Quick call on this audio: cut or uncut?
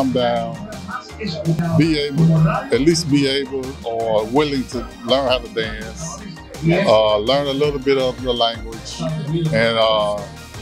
cut